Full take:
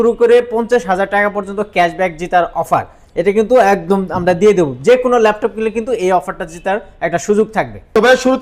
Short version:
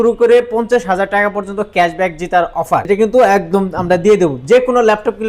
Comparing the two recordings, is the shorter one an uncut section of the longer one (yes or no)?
no